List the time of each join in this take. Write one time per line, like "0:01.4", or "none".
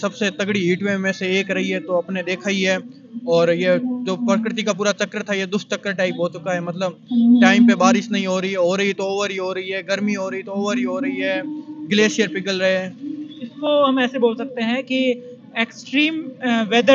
none